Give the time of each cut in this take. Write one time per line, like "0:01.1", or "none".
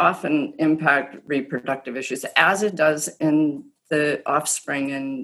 0:01.2